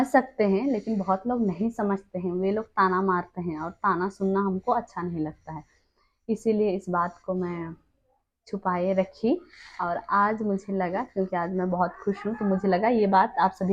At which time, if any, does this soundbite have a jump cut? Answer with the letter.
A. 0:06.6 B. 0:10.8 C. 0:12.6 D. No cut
D